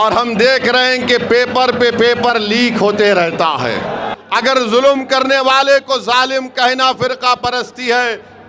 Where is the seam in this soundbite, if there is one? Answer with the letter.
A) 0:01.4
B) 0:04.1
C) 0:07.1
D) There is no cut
B